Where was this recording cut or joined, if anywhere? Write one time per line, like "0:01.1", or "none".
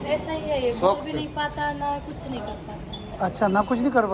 none